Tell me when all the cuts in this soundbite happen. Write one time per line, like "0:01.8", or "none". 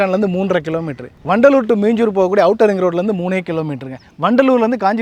none